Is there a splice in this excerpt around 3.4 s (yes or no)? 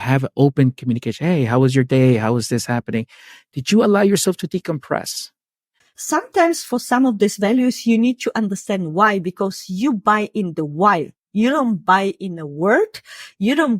no